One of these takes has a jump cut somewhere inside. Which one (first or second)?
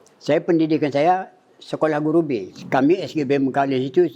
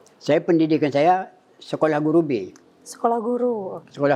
first